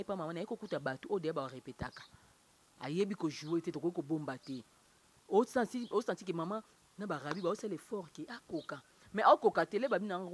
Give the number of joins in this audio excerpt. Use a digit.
0